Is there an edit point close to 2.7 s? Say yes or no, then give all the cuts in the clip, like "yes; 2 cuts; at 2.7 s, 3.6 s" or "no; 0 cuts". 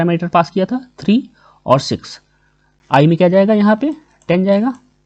yes; 1 cut; at 2.7 s